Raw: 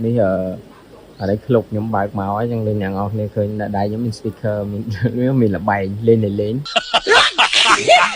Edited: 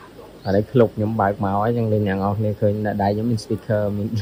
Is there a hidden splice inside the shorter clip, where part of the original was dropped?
no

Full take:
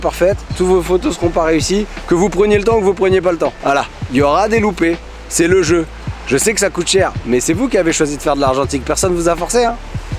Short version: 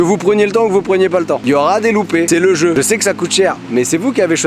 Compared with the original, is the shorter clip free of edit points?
no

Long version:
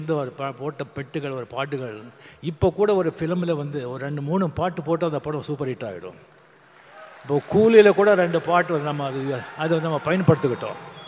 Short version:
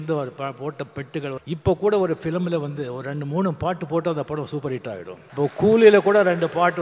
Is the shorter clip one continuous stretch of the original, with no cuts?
no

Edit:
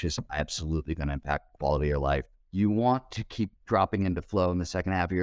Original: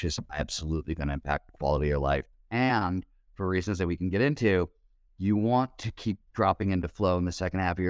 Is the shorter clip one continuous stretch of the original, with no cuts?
no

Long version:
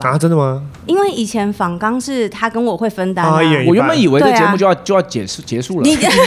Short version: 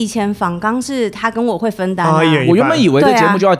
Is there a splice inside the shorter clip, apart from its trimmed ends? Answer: no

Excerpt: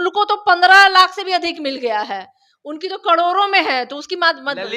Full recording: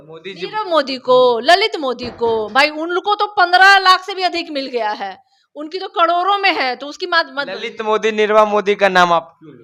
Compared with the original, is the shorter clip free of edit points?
yes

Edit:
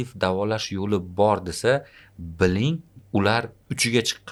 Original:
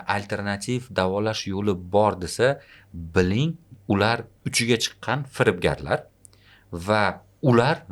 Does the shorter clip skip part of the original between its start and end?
no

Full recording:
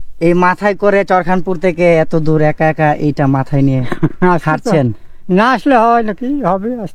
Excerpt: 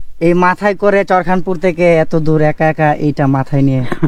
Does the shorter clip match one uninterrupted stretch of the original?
yes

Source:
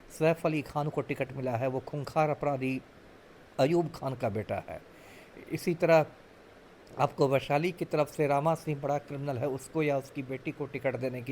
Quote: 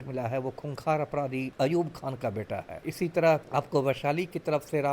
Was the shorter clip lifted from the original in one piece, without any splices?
no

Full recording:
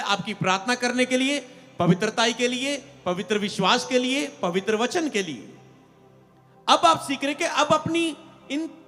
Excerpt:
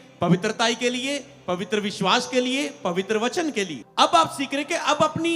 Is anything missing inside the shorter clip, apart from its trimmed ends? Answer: yes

